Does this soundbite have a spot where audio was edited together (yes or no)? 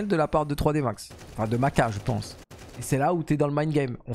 no